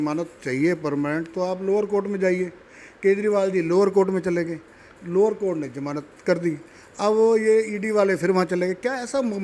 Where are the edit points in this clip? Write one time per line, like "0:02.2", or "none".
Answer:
none